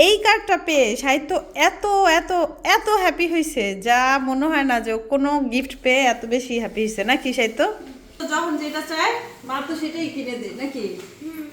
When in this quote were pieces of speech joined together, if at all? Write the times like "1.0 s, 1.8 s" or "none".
8.1 s